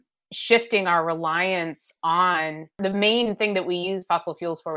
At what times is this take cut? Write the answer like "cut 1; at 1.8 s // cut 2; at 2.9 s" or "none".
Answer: cut 1; at 2.8 s